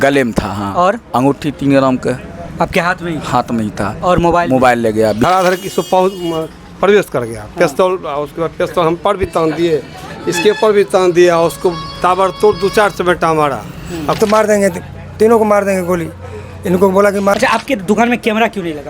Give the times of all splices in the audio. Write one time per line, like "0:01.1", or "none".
0:05.2
0:14.2
0:17.3